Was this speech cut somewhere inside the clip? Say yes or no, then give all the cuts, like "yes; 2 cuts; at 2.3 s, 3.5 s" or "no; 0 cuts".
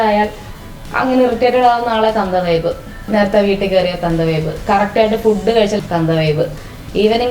yes; 2 cuts; at 3.0 s, 5.8 s